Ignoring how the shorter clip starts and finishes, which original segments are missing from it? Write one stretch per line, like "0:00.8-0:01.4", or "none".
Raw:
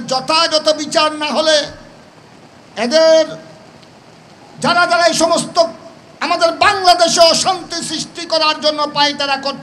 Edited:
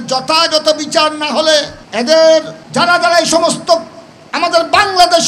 0:01.8-0:02.6
0:03.4-0:04.5